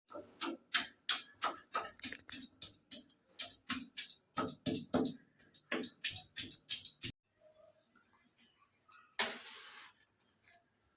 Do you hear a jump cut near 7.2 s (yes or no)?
yes